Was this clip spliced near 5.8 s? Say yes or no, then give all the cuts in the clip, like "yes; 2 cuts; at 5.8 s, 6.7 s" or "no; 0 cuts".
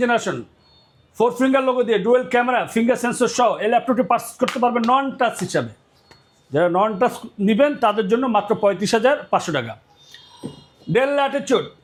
no; 0 cuts